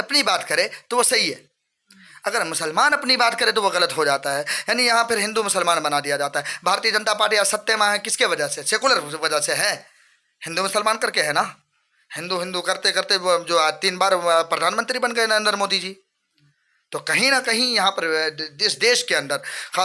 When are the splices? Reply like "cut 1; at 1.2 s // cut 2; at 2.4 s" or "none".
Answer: none